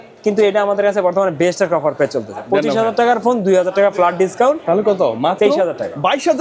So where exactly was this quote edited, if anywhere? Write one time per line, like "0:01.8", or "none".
none